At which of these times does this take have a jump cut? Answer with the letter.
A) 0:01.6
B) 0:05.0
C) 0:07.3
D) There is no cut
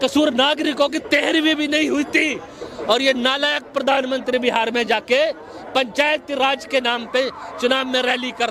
D